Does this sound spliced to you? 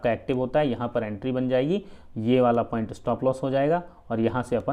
no; 0 cuts

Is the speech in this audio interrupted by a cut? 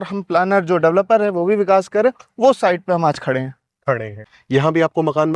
yes; 1 cut; at 4.2 s

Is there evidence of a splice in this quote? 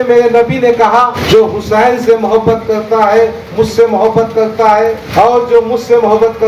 yes; 2 cuts; at 1.2 s, 5.0 s

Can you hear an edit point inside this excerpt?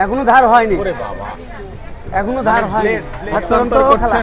yes; 1 cut; at 3.1 s

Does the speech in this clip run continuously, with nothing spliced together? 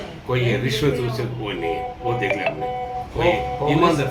yes; 0 cuts

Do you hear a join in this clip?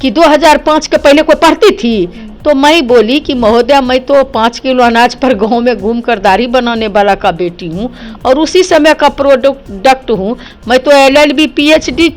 no; 0 cuts

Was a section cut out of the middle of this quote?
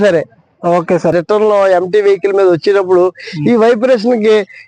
yes; 1 cut; at 1.1 s

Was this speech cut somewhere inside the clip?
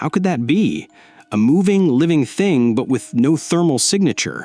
no; 0 cuts

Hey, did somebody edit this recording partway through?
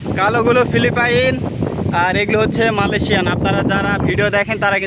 no; 0 cuts

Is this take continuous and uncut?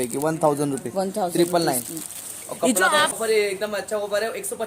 no; 1 cut; at 3.1 s

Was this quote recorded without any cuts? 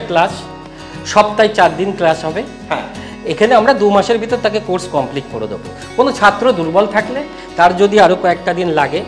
yes; 0 cuts

